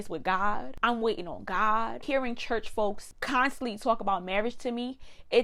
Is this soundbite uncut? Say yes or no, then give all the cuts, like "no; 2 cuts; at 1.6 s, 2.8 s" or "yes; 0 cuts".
yes; 0 cuts